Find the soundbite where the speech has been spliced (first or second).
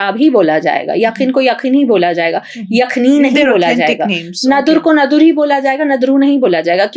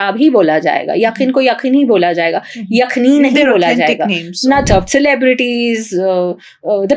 second